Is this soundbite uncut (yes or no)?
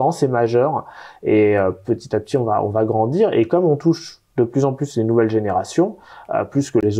yes